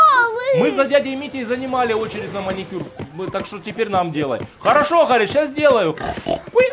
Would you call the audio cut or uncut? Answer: uncut